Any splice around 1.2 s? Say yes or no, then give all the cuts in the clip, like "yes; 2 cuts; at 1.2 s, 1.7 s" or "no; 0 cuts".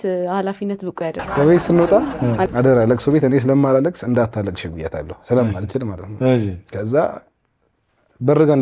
yes; 1 cut; at 1.2 s